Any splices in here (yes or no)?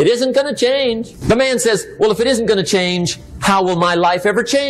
yes